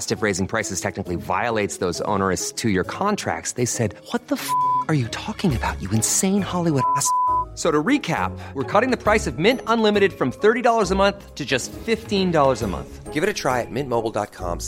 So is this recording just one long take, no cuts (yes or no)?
yes